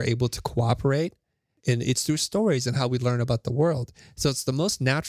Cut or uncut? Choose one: cut